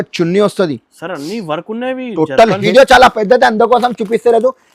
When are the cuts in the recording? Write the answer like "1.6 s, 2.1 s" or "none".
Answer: 2.6 s